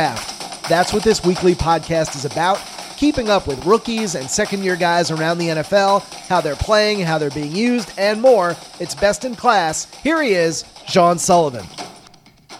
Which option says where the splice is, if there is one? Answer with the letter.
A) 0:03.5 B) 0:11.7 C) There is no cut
B